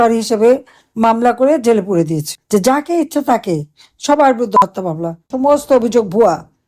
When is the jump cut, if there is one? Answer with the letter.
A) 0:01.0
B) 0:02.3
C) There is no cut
B